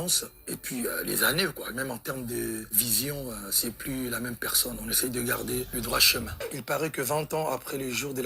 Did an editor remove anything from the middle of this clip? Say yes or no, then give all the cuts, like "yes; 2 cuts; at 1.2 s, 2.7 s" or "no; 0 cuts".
yes; 1 cut; at 6.4 s